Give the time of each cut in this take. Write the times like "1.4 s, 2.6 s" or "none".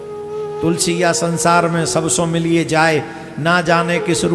none